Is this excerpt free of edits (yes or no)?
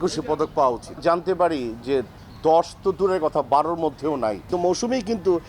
no